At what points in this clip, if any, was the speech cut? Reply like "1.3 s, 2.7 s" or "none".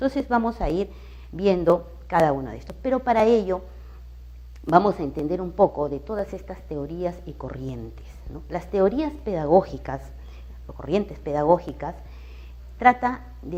none